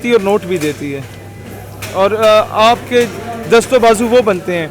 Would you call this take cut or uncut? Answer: uncut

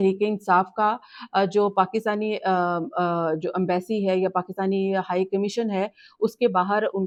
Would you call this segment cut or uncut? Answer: uncut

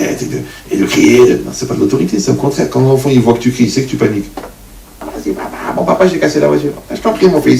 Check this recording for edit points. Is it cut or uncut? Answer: cut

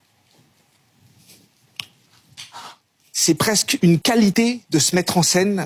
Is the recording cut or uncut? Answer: uncut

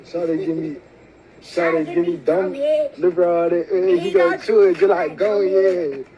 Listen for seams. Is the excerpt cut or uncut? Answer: cut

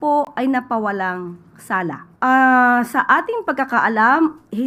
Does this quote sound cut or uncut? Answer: cut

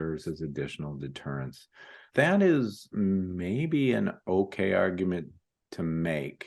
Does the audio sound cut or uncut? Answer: cut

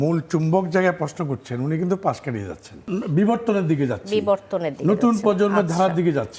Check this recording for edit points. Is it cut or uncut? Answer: cut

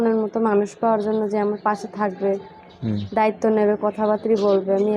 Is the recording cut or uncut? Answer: uncut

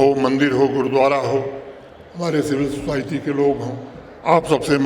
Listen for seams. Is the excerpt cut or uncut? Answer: uncut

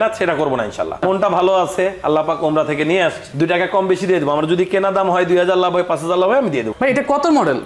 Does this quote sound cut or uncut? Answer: cut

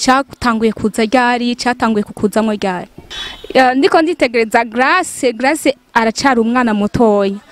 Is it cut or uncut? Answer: cut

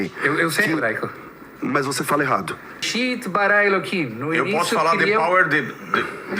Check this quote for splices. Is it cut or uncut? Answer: cut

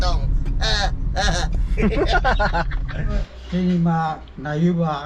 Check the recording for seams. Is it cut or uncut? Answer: cut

